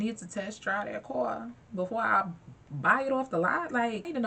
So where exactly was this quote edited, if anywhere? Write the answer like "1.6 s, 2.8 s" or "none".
none